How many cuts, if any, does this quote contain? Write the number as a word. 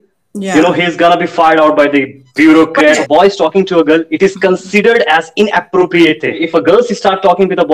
two